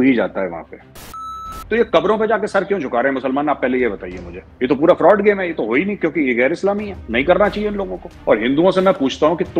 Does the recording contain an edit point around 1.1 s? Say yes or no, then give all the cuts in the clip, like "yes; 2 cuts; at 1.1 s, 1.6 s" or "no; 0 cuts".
yes; 1 cut; at 1.1 s